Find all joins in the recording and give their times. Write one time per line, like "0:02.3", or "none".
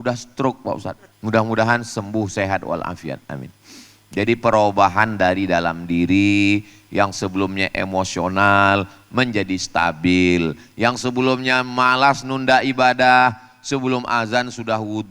0:01.1